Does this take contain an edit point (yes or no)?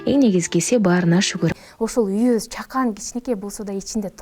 yes